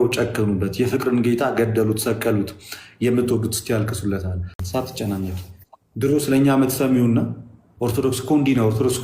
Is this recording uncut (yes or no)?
no